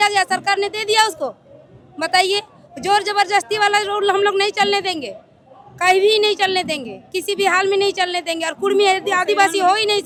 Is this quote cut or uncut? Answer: uncut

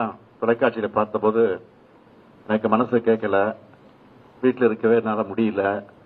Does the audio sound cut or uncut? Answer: uncut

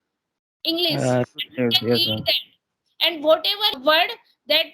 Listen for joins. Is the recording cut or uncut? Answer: cut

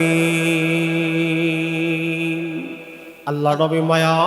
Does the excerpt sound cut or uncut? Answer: cut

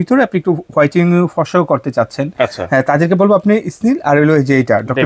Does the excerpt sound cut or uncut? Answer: uncut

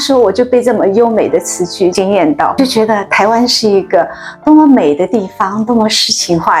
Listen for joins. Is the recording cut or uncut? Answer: uncut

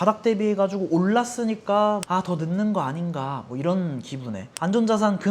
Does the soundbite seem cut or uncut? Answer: cut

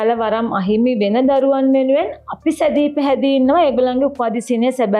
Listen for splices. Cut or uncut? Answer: uncut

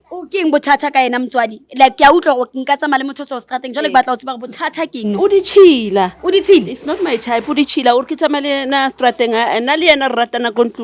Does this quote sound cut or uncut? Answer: uncut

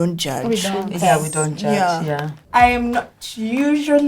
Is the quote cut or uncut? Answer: cut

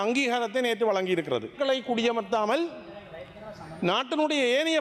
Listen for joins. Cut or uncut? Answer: cut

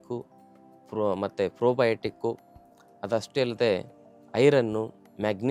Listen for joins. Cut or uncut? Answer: uncut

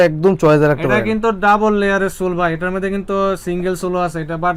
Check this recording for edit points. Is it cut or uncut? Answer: uncut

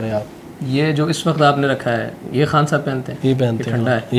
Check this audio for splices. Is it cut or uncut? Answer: uncut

